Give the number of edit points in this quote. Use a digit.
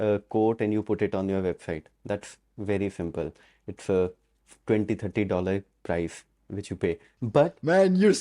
1